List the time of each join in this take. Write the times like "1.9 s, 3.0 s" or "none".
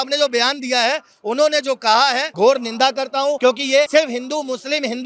2.3 s, 3.6 s